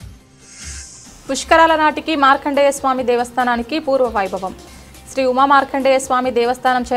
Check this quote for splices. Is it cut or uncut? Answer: uncut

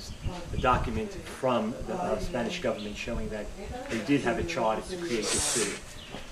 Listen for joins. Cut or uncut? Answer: cut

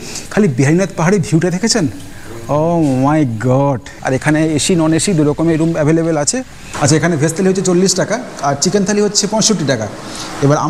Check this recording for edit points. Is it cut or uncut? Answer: cut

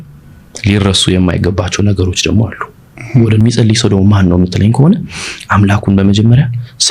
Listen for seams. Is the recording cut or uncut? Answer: cut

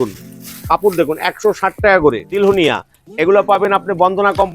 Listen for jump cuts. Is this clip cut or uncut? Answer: cut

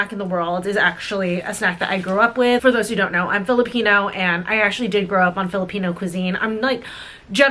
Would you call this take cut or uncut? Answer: uncut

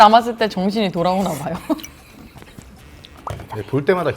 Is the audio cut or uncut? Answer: cut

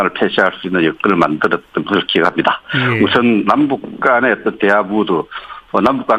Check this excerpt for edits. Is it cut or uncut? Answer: uncut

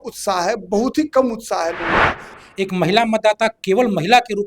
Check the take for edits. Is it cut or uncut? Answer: cut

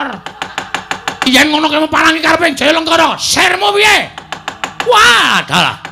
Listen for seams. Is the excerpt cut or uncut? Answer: uncut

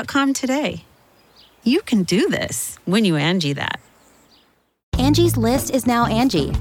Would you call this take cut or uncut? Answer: cut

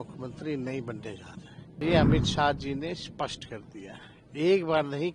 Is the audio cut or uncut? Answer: cut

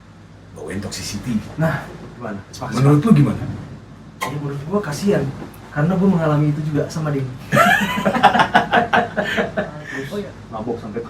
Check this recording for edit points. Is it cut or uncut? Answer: cut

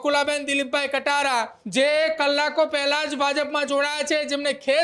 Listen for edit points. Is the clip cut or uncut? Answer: cut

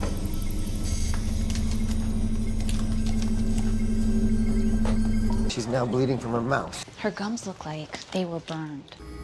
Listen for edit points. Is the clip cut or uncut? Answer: uncut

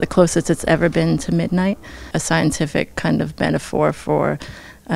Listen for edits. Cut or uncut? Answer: cut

